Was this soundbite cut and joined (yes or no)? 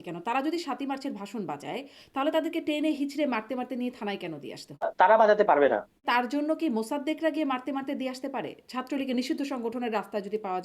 yes